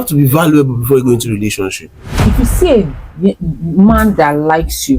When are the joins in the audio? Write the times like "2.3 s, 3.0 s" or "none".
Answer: 2.2 s